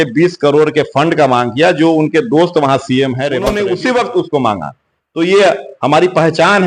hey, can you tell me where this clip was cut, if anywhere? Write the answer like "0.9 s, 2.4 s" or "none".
3.4 s